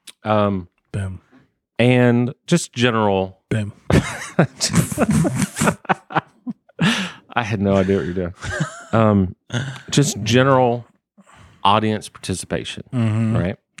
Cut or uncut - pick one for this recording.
uncut